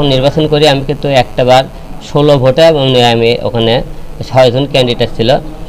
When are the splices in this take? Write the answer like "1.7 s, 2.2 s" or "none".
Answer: none